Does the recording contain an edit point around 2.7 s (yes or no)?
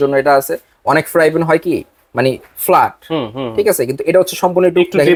no